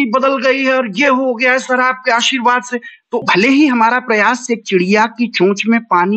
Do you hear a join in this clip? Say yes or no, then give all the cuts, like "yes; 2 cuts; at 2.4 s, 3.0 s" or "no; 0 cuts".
yes; 1 cut; at 3.2 s